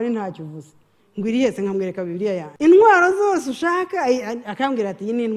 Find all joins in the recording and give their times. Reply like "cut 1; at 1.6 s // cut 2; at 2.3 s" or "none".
cut 1; at 2.5 s